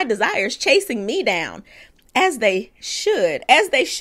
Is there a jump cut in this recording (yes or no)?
no